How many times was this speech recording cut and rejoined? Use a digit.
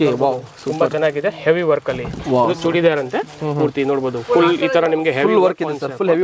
0